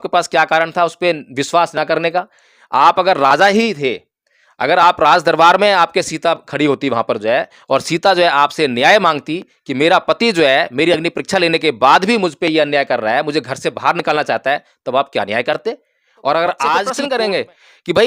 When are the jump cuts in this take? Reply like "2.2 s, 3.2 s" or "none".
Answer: 16.9 s